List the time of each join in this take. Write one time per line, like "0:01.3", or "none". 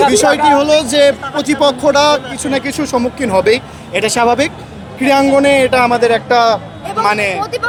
none